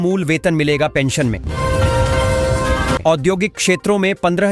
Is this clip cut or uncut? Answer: cut